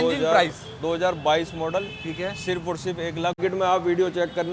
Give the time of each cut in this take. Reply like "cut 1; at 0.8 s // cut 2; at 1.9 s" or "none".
cut 1; at 3.4 s